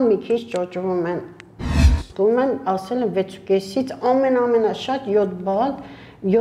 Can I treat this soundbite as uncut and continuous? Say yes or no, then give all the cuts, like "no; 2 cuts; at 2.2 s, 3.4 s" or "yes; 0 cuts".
no; 1 cut; at 1.9 s